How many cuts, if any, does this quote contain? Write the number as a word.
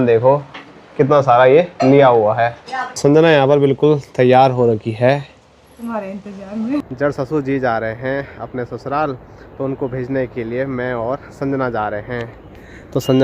two